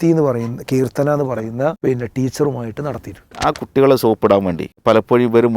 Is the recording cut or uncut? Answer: cut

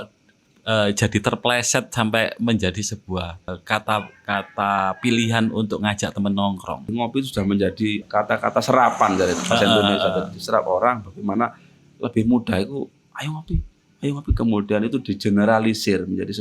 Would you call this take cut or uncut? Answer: cut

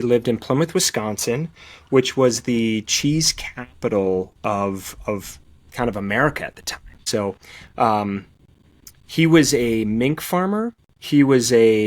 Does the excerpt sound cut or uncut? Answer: cut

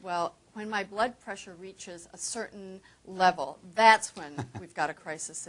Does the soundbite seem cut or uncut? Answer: cut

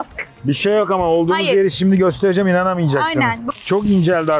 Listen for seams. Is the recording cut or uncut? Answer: cut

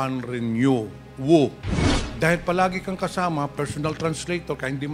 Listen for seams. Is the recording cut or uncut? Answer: cut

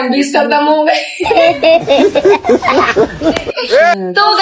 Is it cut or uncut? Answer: uncut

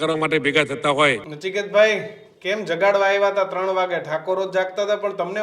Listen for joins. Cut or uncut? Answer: cut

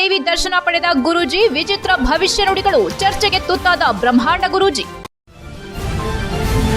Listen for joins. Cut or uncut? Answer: cut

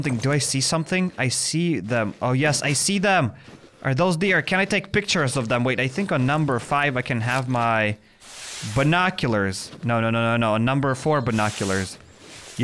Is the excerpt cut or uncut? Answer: uncut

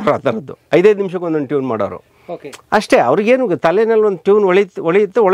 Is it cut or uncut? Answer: uncut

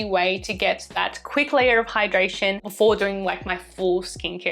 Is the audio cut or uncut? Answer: uncut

